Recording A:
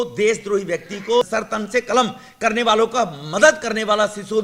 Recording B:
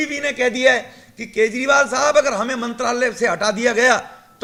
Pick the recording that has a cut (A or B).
A